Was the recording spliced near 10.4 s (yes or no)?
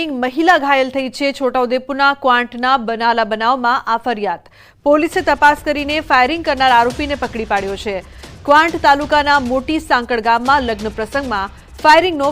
yes